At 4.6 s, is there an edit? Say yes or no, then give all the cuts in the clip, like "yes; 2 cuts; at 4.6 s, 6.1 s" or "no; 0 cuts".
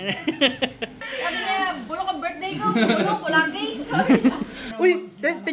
yes; 2 cuts; at 1.0 s, 4.6 s